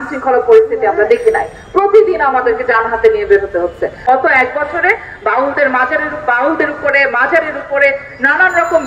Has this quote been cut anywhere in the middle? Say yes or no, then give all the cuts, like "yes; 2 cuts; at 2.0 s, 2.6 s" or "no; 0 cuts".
yes; 1 cut; at 4.0 s